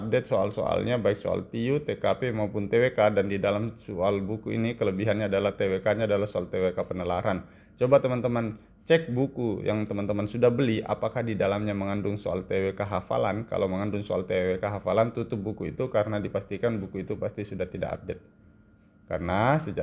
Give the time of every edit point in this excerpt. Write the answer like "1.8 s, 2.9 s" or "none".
none